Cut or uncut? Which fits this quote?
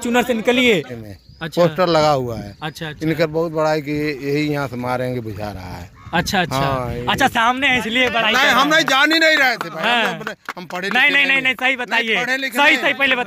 cut